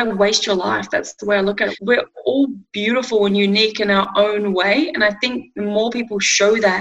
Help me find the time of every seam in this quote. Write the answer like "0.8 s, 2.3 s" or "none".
1.7 s